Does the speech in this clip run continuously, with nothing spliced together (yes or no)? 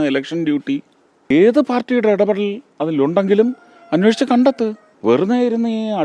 no